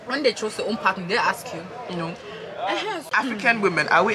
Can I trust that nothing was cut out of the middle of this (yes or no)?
no